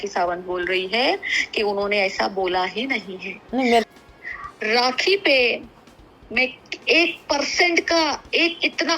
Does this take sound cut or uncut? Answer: cut